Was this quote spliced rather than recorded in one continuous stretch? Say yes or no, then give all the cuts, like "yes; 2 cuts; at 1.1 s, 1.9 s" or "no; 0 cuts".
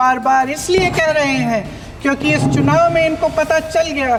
no; 0 cuts